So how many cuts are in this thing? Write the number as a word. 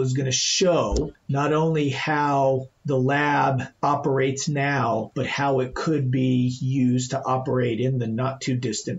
three